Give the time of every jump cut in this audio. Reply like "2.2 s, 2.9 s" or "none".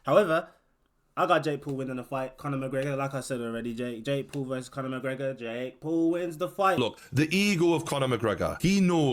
6.8 s